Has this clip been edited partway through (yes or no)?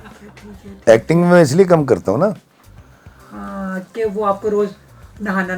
no